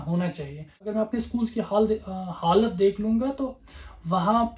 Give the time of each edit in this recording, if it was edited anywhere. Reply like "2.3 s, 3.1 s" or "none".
0.9 s